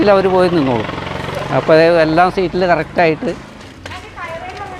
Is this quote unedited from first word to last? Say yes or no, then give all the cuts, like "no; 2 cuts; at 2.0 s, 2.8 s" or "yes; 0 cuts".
yes; 0 cuts